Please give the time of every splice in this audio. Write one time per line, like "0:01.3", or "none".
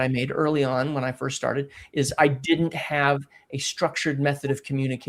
none